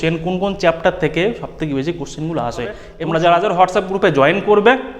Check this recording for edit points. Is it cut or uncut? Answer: cut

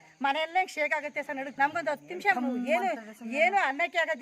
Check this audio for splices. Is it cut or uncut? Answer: cut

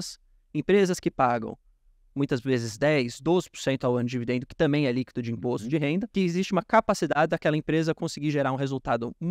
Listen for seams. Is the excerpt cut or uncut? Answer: cut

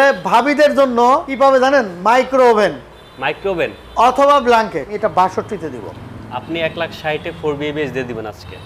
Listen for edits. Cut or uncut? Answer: cut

